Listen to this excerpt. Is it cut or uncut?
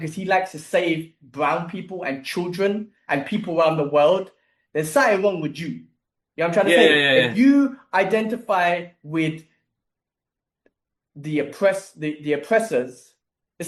uncut